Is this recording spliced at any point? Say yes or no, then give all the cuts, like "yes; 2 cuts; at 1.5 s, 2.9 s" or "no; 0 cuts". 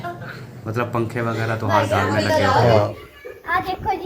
yes; 1 cut; at 2.9 s